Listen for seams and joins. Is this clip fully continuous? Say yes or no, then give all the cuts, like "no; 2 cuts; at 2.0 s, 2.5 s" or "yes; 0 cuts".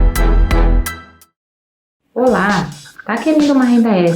no; 1 cut; at 2.0 s